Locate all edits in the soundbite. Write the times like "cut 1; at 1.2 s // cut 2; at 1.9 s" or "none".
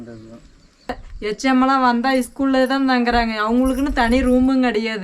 cut 1; at 1.0 s